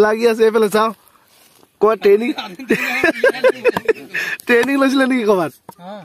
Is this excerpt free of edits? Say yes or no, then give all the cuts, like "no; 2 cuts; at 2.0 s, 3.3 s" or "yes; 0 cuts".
yes; 0 cuts